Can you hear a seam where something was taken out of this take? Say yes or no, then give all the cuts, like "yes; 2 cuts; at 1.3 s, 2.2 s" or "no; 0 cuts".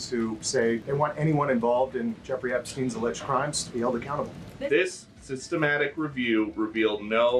yes; 2 cuts; at 0.8 s, 4.5 s